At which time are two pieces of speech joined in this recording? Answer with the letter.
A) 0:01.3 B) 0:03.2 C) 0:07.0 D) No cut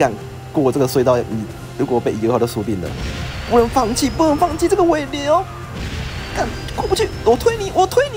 D